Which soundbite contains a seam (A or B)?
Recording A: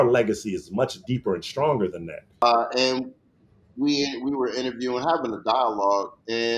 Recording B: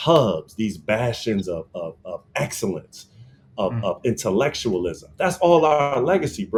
A